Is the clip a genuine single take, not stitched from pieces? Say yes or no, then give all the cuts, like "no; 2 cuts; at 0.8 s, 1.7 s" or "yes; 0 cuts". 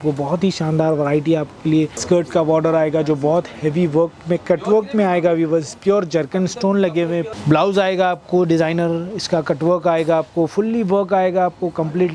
no; 2 cuts; at 2.0 s, 7.3 s